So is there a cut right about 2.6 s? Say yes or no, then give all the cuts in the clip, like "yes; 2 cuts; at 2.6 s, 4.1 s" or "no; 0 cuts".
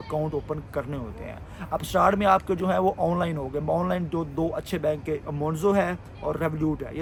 no; 0 cuts